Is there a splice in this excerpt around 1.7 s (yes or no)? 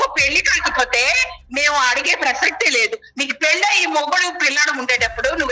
no